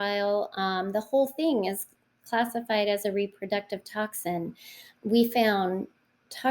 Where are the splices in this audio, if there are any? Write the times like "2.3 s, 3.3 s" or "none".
5.0 s